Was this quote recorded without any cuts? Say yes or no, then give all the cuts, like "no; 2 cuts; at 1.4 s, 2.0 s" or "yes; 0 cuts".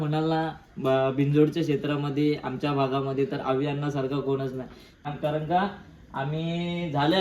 no; 1 cut; at 5.1 s